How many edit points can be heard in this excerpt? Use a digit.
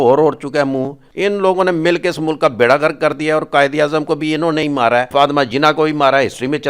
2